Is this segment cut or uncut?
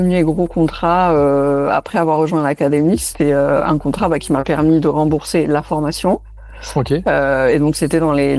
uncut